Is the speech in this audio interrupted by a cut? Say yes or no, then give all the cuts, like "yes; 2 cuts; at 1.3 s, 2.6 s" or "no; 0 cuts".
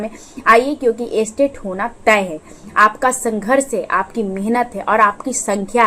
no; 0 cuts